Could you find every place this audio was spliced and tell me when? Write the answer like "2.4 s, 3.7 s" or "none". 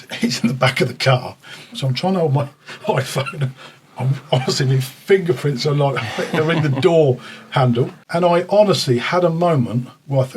1.8 s, 8.0 s